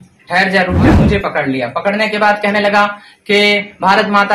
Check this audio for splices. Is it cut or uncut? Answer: cut